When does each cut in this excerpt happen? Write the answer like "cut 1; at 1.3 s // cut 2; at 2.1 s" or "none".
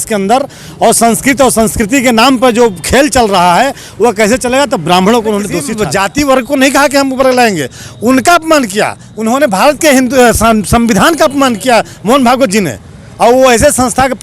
cut 1; at 5.7 s